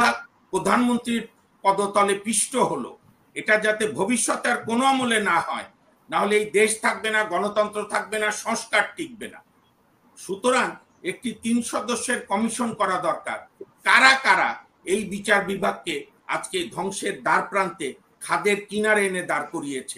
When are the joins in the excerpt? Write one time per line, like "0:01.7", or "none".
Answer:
none